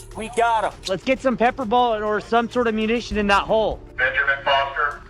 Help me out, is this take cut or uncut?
cut